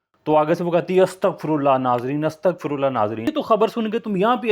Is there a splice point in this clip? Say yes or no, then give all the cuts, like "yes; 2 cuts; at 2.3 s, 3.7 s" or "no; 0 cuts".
yes; 1 cut; at 3.3 s